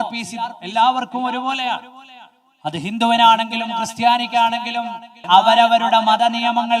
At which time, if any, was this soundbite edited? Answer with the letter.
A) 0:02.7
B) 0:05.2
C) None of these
B